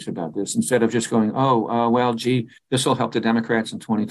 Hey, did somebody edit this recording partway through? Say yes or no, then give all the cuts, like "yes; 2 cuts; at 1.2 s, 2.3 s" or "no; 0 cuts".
no; 0 cuts